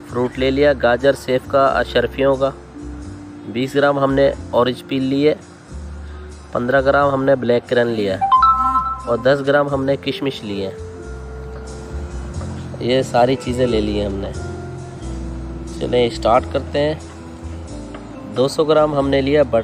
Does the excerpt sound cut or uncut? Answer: cut